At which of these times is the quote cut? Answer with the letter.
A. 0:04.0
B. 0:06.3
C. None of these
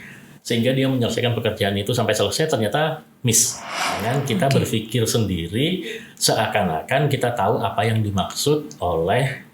A